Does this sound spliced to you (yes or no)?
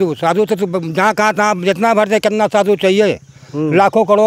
no